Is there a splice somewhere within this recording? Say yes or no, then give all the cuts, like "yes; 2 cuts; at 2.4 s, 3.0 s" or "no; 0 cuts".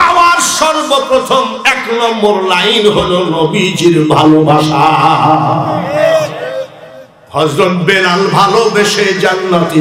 no; 0 cuts